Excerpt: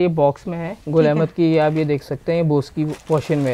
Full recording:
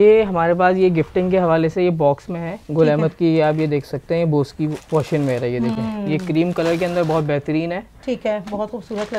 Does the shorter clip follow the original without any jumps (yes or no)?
yes